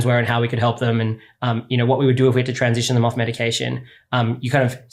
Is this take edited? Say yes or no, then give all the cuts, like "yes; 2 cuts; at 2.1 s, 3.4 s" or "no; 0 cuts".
no; 0 cuts